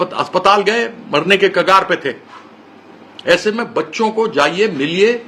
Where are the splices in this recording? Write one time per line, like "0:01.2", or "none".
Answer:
none